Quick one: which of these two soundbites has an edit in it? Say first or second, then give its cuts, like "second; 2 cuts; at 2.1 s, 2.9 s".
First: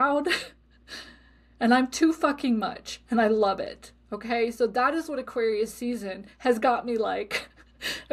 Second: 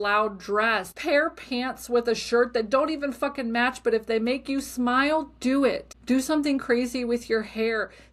second; 2 cuts; at 0.9 s, 5.9 s